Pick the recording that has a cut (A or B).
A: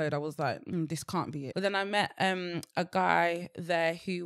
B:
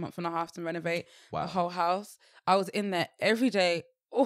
A